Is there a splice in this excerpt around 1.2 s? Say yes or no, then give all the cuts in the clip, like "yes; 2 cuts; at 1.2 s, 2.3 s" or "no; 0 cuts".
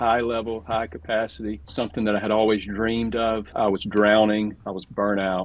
no; 1 cut; at 3.5 s